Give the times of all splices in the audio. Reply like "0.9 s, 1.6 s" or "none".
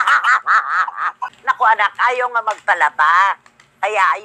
1.3 s